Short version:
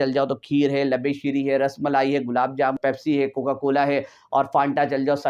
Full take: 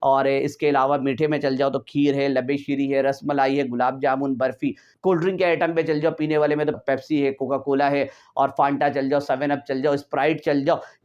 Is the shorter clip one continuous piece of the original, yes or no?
no